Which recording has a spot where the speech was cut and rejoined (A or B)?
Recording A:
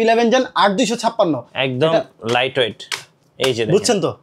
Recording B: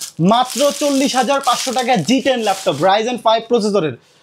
A